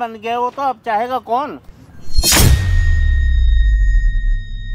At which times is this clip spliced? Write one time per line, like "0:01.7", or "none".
0:02.2